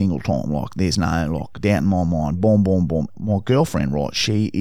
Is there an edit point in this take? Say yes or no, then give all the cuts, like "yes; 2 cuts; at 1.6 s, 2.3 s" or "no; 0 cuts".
yes; 1 cut; at 3.1 s